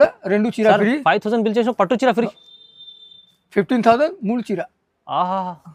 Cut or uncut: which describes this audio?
uncut